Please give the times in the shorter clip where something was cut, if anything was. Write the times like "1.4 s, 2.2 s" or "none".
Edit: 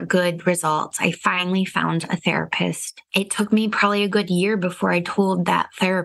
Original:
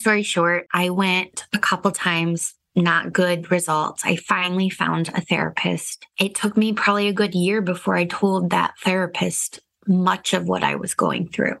none